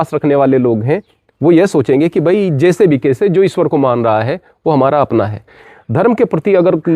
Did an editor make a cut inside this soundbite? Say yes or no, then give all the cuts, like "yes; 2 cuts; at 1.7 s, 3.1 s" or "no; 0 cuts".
yes; 1 cut; at 5.7 s